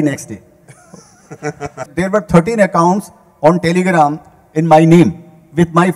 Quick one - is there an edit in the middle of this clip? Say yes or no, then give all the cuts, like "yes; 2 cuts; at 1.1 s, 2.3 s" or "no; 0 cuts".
yes; 1 cut; at 1.8 s